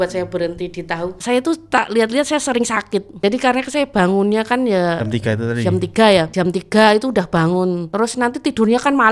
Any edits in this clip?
yes; 4 cuts; at 1.2 s, 3.2 s, 6.3 s, 7.9 s

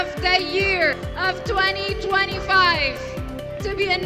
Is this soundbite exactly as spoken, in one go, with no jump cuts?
no; 1 cut; at 1.0 s

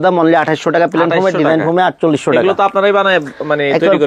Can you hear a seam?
no; 0 cuts

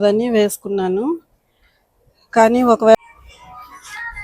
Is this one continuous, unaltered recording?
no; 1 cut; at 2.9 s

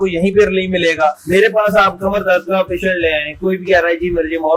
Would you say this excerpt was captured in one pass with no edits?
no; 1 cut; at 1.2 s

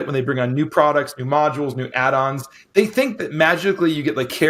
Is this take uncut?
yes; 0 cuts

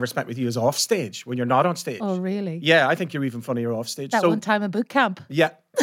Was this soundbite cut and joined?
no; 0 cuts

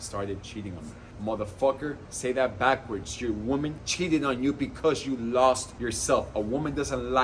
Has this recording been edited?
yes; 3 cuts; at 1.0 s, 3.8 s, 5.7 s

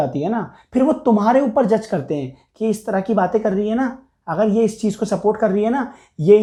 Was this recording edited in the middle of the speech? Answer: no; 0 cuts

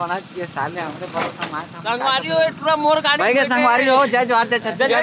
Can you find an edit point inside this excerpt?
no; 0 cuts

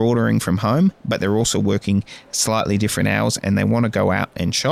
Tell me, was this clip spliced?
no; 0 cuts

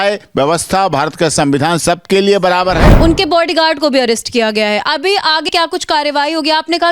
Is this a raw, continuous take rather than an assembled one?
no; 1 cut; at 2.9 s

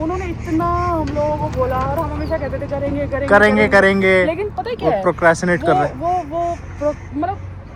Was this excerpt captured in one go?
yes; 0 cuts

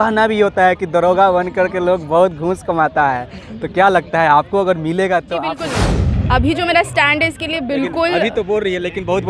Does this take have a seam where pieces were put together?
yes; 1 cut; at 5.8 s

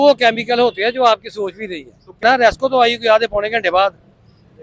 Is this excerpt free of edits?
no; 1 cut; at 2.2 s

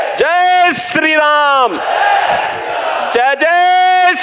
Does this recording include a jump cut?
no; 0 cuts

